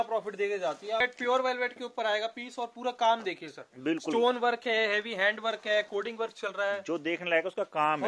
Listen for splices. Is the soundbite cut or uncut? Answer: cut